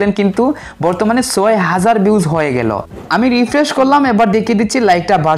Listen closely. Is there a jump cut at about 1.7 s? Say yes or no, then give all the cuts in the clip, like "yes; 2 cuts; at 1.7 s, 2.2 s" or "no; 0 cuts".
no; 1 cut; at 3.1 s